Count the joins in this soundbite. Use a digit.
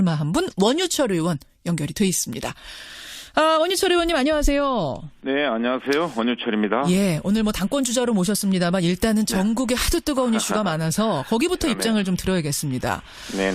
1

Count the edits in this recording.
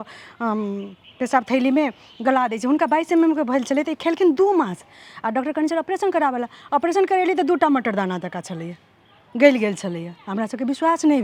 0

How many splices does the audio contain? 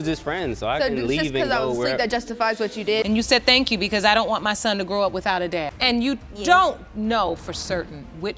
1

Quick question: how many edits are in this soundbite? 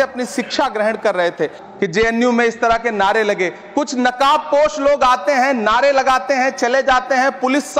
1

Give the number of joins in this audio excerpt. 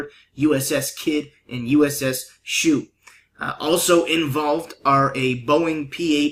0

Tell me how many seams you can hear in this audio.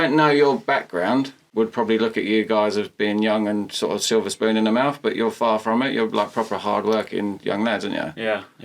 1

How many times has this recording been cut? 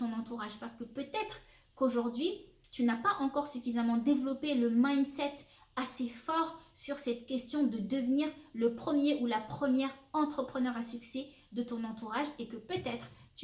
0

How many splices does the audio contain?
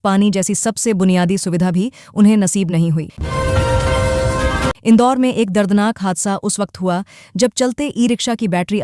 0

